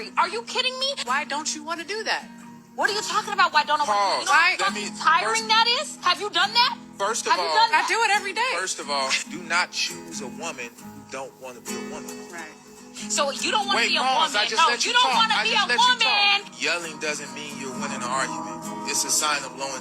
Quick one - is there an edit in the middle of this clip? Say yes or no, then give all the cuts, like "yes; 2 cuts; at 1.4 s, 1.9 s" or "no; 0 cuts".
yes; 2 cuts; at 8.3 s, 9.6 s